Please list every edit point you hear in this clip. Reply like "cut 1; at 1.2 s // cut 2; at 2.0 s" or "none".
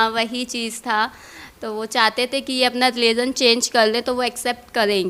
none